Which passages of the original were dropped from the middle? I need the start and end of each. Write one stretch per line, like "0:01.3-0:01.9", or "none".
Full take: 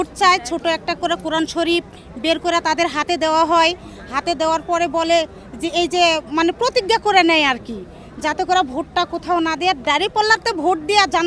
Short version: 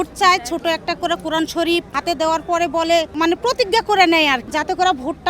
0:01.9-0:04.1
0:05.3-0:06.3
0:07.6-0:08.1

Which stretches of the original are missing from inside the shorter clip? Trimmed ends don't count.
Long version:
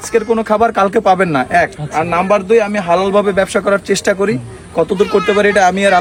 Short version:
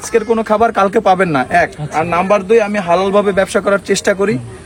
none

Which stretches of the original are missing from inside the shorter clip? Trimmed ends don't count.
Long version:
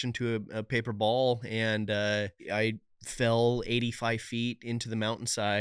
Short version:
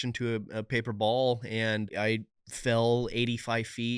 0:01.9-0:02.4

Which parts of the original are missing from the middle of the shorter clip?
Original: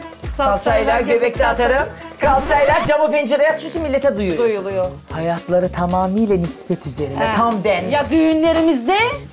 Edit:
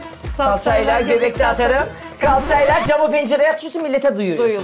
none

